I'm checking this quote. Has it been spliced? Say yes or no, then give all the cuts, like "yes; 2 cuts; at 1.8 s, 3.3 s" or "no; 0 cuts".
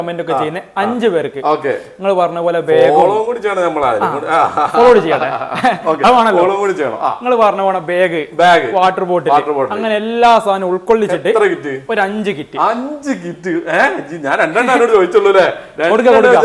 no; 0 cuts